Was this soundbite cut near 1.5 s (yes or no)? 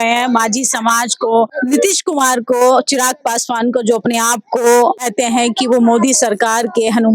yes